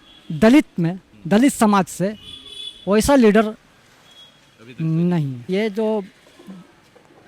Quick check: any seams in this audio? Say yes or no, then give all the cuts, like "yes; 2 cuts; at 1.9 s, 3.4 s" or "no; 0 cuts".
yes; 1 cut; at 5.5 s